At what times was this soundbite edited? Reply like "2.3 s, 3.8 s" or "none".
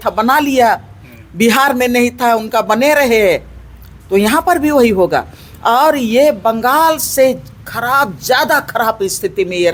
none